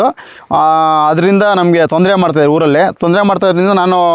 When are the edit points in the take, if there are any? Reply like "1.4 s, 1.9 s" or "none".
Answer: none